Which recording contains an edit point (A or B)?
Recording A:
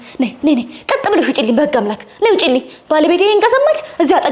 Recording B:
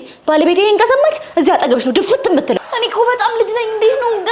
B